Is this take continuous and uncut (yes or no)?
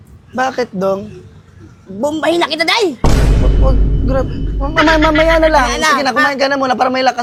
yes